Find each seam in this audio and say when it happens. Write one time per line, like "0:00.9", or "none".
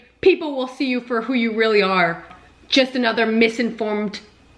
0:02.2